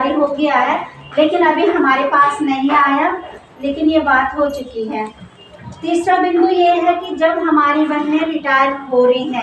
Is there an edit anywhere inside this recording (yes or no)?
no